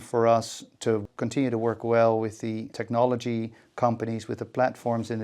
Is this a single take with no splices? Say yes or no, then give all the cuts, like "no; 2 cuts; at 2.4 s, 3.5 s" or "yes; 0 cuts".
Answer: no; 2 cuts; at 1.1 s, 2.7 s